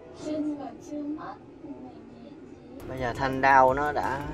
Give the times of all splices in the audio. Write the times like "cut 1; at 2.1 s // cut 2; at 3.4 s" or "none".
cut 1; at 2.8 s